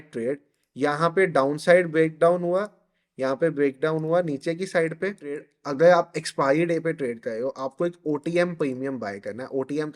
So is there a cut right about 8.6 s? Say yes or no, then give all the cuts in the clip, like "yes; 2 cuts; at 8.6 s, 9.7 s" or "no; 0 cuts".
no; 1 cut; at 5.5 s